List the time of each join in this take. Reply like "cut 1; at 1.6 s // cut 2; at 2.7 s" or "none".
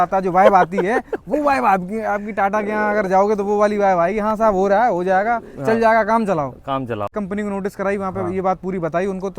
cut 1; at 7.1 s